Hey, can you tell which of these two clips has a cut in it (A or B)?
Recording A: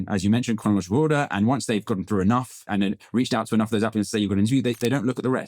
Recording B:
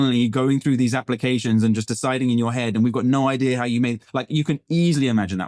A